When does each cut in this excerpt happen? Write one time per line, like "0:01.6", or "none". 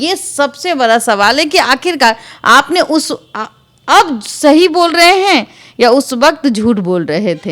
none